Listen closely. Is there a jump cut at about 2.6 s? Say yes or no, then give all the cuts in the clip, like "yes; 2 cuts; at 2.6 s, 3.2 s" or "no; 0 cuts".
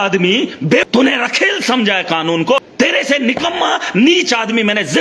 yes; 2 cuts; at 0.8 s, 2.6 s